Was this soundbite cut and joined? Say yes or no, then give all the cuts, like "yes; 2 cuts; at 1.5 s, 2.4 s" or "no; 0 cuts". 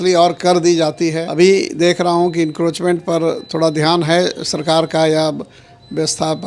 yes; 1 cut; at 1.2 s